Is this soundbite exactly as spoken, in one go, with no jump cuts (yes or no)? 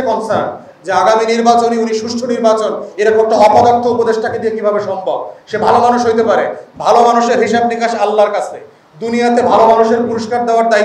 yes